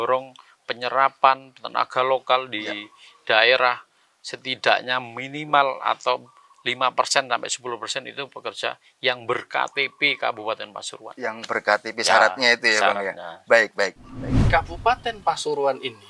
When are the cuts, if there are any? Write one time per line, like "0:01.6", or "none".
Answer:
0:14.5